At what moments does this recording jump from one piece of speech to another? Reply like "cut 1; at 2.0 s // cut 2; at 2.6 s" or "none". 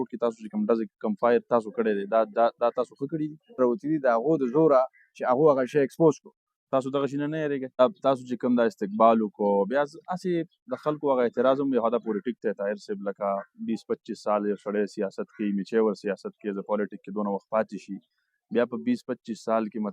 cut 1; at 3.6 s // cut 2; at 7.8 s